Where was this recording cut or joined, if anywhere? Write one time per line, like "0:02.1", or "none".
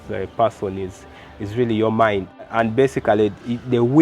0:02.5